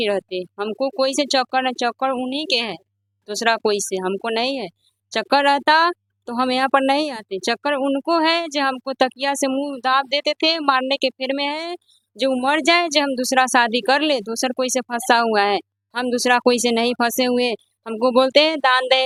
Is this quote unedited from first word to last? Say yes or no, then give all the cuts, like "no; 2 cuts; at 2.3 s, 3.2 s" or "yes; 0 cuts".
yes; 0 cuts